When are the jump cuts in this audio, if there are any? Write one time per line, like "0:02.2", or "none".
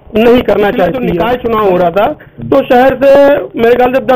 0:01.1